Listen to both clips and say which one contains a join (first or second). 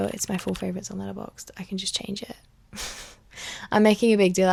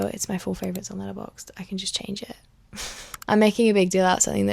second